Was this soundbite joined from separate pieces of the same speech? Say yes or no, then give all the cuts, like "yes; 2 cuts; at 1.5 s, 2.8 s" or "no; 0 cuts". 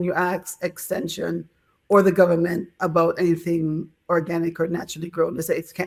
no; 0 cuts